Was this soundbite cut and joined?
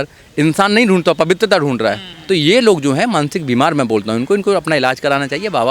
yes; 1 cut; at 2.1 s

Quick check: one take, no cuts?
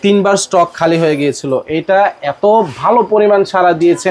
yes; 0 cuts

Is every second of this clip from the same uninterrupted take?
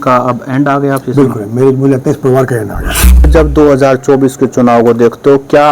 no; 1 cut; at 3.2 s

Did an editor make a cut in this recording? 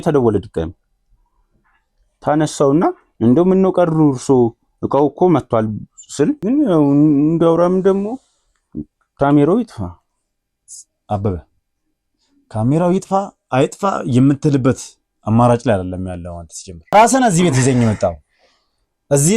yes; 2 cuts; at 6.4 s, 16.9 s

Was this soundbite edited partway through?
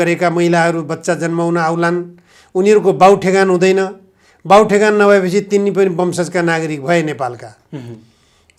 no; 0 cuts

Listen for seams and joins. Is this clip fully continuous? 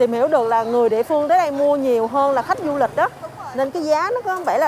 yes; 0 cuts

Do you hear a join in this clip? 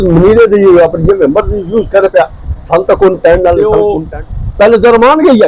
yes; 1 cut; at 3.7 s

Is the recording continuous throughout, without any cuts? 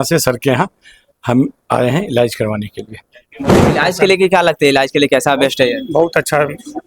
no; 1 cut; at 3.7 s

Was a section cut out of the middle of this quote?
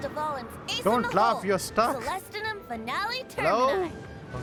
no; 0 cuts

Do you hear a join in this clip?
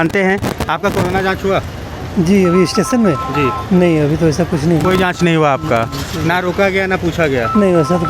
no; 0 cuts

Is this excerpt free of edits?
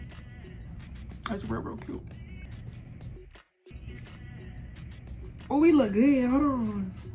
no; 2 cuts; at 2.5 s, 3.7 s

